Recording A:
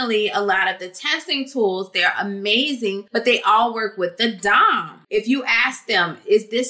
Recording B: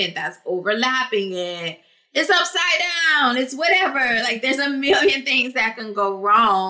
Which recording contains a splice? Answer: A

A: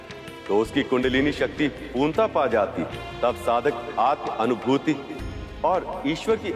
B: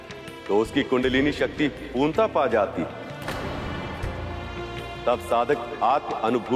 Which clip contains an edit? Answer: A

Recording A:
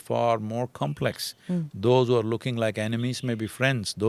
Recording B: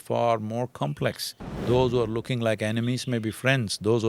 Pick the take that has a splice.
B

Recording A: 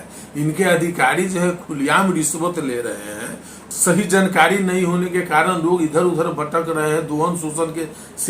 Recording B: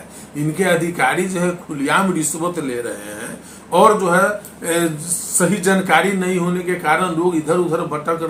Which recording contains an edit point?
A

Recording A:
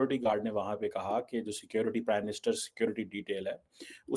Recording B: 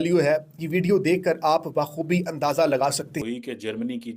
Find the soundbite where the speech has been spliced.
B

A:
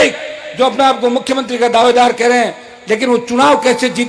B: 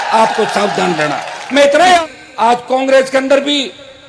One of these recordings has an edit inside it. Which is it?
B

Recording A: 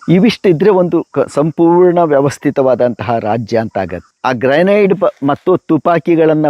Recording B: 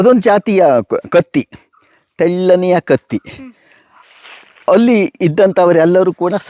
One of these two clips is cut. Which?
A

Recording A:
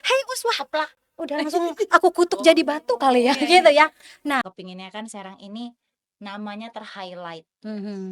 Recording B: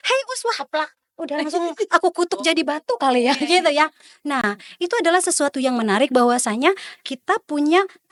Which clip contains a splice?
A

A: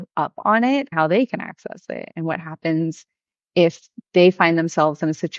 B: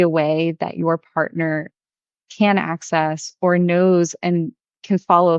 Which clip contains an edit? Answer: A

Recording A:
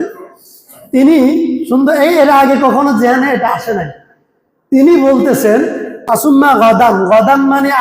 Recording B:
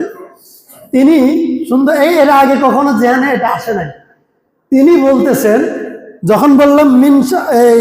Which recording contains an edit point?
A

